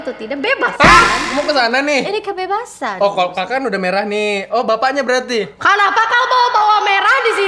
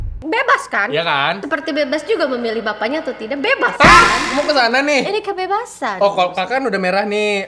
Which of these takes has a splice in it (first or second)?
second